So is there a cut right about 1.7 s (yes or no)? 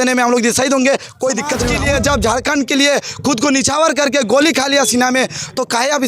yes